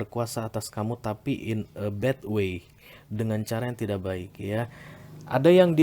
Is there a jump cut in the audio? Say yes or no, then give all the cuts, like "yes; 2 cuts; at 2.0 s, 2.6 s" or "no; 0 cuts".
no; 0 cuts